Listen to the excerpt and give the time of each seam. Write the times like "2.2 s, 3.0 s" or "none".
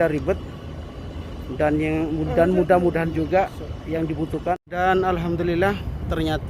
4.5 s